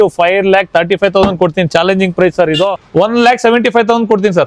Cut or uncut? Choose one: cut